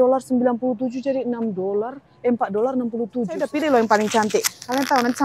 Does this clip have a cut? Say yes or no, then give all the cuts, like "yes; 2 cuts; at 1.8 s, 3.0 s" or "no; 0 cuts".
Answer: yes; 1 cut; at 3.5 s